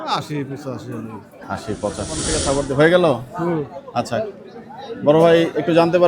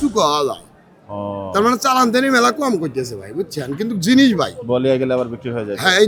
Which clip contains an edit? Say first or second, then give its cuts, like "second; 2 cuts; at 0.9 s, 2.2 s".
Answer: first; 1 cut; at 2.3 s